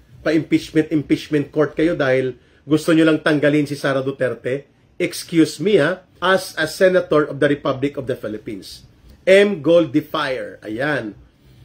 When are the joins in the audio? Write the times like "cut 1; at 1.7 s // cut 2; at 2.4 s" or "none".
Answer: cut 1; at 6.1 s